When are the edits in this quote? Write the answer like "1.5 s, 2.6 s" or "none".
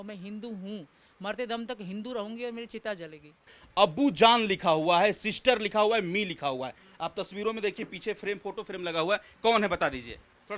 none